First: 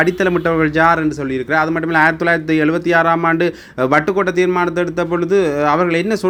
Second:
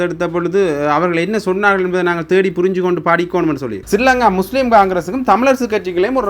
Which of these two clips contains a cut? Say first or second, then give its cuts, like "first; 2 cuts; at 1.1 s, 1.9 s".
second; 1 cut; at 3.8 s